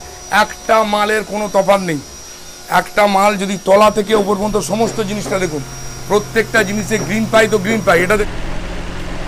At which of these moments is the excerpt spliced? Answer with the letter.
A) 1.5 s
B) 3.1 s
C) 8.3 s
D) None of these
C